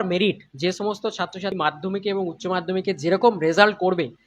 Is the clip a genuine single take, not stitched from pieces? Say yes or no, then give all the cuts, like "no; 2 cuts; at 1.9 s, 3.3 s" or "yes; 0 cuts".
no; 1 cut; at 1.5 s